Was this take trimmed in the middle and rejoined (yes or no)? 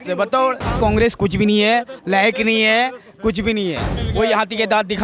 yes